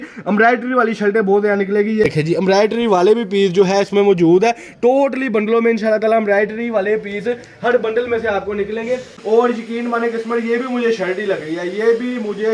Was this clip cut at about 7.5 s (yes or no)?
no